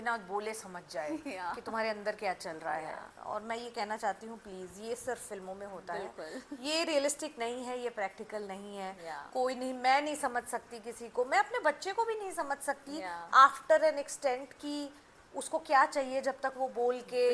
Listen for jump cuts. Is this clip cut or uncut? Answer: uncut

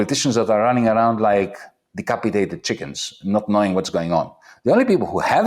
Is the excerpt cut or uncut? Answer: uncut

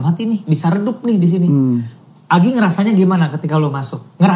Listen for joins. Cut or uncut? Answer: uncut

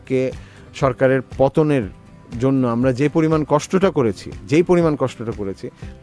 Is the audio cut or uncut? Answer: uncut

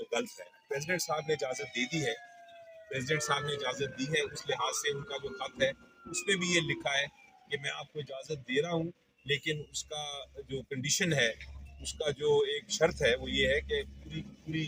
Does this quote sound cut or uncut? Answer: uncut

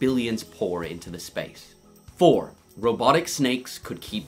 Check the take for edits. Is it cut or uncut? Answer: cut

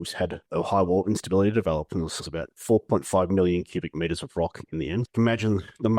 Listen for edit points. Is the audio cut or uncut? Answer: cut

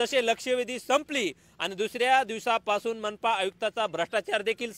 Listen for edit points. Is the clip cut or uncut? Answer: uncut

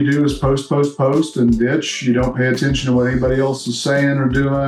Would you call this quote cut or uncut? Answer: uncut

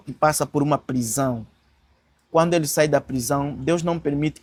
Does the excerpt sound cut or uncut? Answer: uncut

